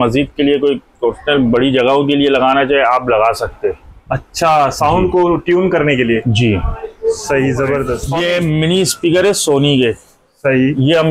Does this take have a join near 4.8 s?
no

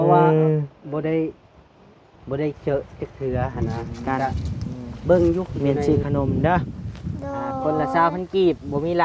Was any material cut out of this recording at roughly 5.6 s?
yes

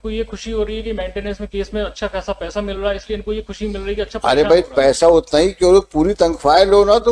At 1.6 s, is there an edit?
no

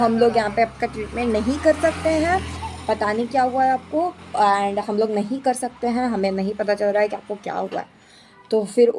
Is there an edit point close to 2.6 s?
no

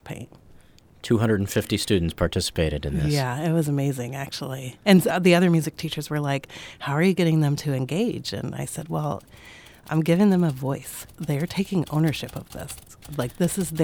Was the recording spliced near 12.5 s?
no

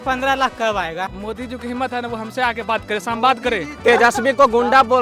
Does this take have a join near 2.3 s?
no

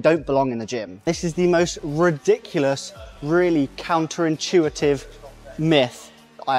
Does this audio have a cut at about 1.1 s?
yes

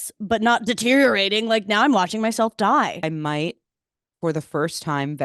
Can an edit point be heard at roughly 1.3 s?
no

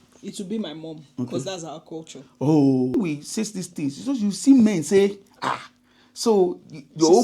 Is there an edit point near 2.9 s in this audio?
yes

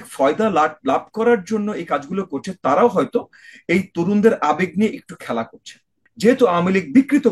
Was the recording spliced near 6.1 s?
yes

